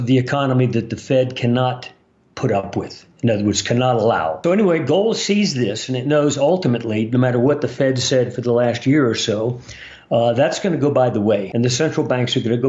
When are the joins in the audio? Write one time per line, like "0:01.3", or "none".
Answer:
0:04.4
0:11.5

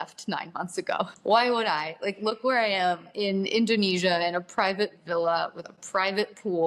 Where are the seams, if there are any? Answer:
0:01.2
0:03.1

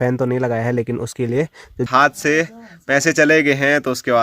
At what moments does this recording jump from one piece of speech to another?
0:01.9

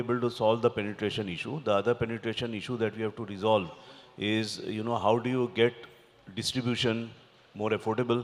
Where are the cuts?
none

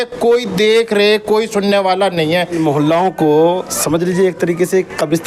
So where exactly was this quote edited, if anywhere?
0:02.5

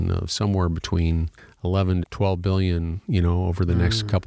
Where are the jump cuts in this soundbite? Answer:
0:02.0

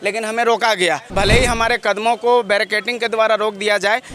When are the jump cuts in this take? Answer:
0:01.1

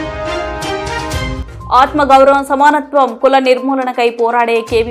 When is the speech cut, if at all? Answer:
0:01.4

